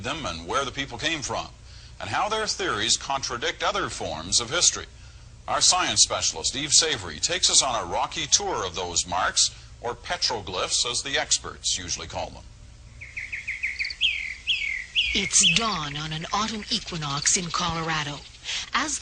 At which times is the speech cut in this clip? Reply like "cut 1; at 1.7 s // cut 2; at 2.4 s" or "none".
cut 1; at 3.3 s